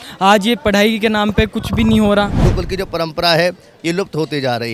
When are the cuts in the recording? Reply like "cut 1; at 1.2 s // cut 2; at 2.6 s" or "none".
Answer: cut 1; at 2.5 s